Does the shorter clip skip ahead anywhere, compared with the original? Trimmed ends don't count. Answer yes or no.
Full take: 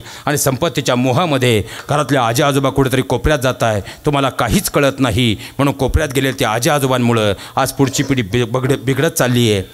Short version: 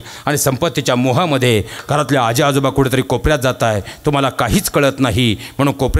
no